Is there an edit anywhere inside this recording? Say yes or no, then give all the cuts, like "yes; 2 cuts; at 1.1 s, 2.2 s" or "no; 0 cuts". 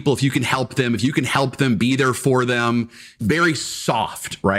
yes; 1 cut; at 3.1 s